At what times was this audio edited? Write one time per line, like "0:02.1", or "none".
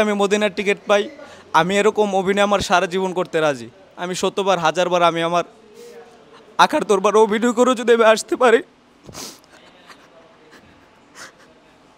none